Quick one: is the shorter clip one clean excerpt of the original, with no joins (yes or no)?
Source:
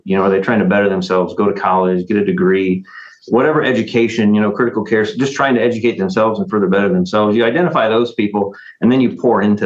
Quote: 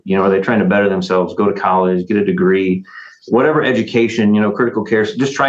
yes